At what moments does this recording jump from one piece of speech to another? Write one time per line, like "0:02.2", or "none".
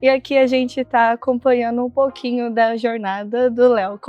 none